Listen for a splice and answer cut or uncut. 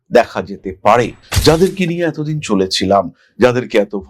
cut